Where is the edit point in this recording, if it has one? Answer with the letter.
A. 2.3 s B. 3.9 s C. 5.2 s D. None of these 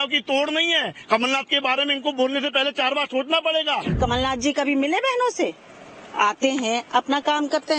B